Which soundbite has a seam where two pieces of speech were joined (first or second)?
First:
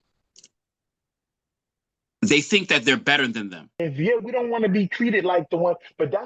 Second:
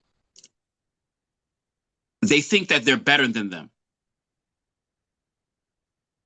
first